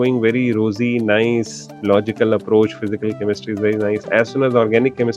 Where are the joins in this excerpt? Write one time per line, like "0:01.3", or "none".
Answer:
none